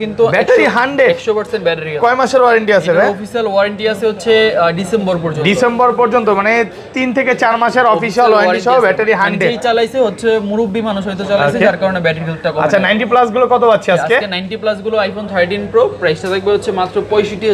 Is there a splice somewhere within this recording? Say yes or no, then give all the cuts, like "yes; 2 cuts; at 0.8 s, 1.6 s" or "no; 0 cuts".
no; 0 cuts